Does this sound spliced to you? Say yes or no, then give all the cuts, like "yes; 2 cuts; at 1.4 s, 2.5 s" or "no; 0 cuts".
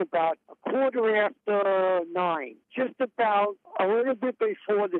yes; 2 cuts; at 2.7 s, 3.6 s